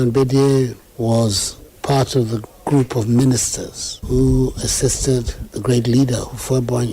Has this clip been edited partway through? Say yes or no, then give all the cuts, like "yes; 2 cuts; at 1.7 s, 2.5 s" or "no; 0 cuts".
yes; 1 cut; at 2.4 s